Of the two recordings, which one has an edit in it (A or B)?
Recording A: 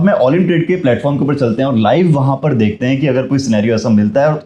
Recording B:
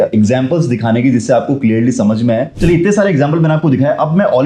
B